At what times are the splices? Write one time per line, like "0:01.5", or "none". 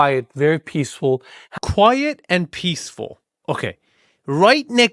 0:01.4